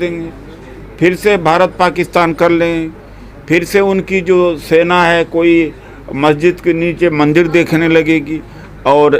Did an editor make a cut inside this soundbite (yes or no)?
no